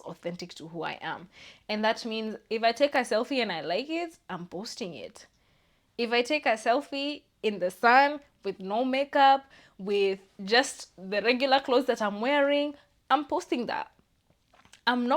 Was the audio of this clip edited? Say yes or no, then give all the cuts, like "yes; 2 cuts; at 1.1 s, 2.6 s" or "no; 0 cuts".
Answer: no; 0 cuts